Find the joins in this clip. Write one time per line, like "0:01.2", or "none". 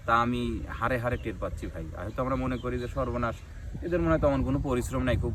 none